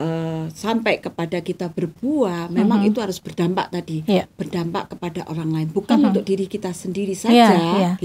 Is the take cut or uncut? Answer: uncut